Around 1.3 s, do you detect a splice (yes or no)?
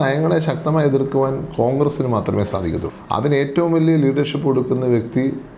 no